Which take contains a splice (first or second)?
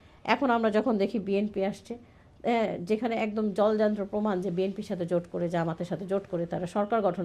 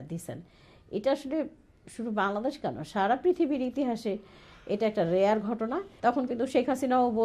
second